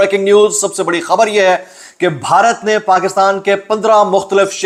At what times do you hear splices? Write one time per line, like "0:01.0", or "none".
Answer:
none

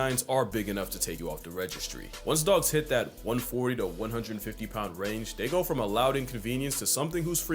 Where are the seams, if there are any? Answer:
0:01.1

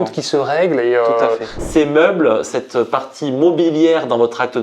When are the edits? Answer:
0:01.5
0:02.5

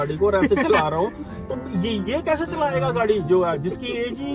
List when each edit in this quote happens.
0:02.0

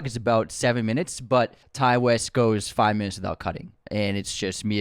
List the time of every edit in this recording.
0:01.6
0:03.7

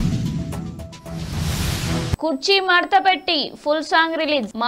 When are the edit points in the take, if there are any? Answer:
0:02.2

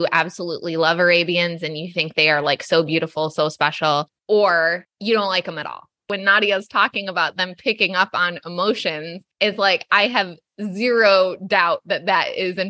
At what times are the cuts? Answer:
0:06.1

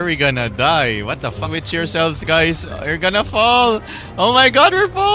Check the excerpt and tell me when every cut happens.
0:01.4

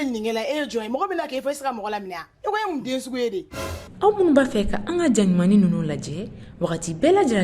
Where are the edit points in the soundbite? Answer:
0:03.8

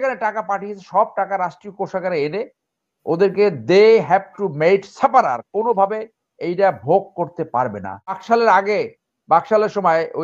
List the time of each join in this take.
0:08.2

